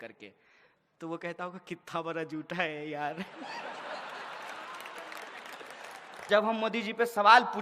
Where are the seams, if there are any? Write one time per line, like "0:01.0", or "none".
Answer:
0:06.3